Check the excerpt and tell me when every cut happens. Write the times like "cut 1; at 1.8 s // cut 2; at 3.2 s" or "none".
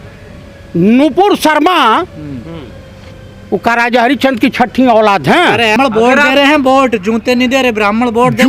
cut 1; at 5.8 s